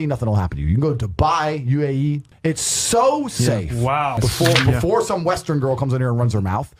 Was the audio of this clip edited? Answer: yes; 2 cuts; at 2.3 s, 4.2 s

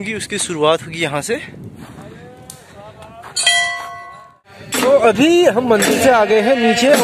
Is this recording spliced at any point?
yes; 1 cut; at 4.8 s

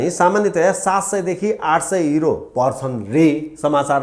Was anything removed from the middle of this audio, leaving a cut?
no; 0 cuts

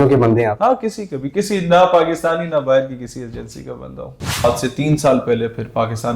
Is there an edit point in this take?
yes; 1 cut; at 4.4 s

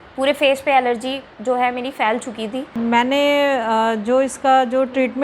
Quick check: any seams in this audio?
yes; 1 cut; at 2.7 s

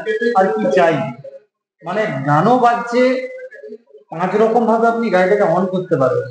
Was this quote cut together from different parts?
no; 0 cuts

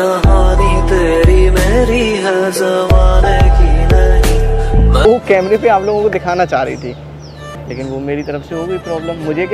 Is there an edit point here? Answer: yes; 1 cut; at 5.1 s

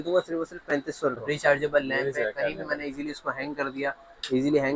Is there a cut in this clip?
yes; 1 cut; at 1.2 s

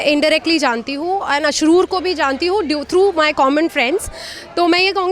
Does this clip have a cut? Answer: no; 0 cuts

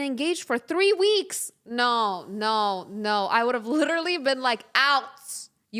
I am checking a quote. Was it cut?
no; 0 cuts

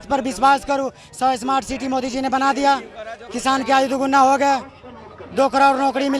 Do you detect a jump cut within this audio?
no; 0 cuts

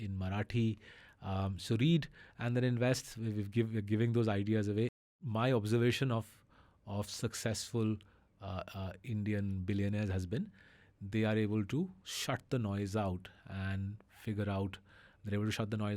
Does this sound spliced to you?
yes; 1 cut; at 5.0 s

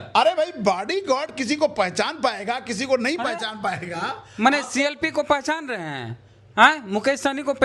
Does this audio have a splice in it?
no; 0 cuts

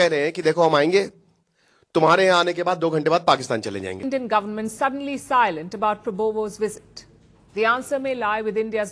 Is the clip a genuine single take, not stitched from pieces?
no; 1 cut; at 4.0 s

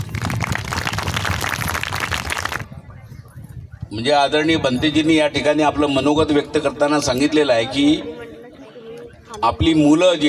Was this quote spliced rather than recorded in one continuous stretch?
yes; 1 cut; at 2.7 s

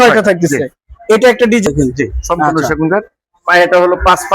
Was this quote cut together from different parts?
yes; 1 cut; at 1.7 s

